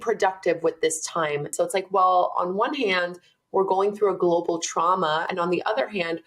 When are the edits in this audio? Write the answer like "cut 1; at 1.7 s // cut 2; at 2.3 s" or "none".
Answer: cut 1; at 1.5 s // cut 2; at 5.3 s